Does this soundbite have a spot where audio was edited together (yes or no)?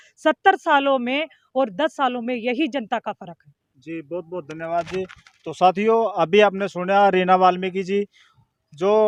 no